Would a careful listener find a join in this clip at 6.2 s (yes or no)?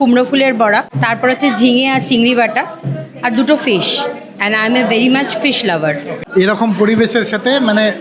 yes